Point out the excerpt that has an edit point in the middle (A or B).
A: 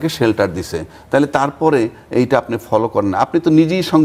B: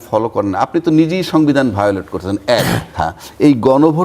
B